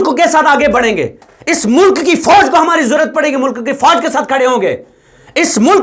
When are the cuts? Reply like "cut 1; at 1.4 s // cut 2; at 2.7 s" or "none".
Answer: none